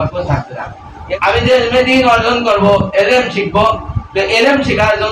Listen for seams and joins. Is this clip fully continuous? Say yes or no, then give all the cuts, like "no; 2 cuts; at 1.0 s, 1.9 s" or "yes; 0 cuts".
no; 1 cut; at 0.9 s